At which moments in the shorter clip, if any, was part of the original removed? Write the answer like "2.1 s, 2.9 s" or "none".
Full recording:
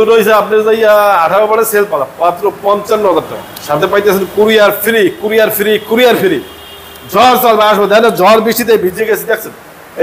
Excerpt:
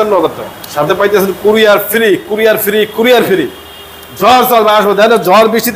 none